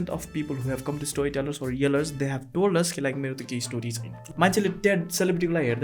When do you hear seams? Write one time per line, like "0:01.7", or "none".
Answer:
0:04.2